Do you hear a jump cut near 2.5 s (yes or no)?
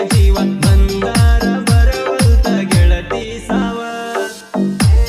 no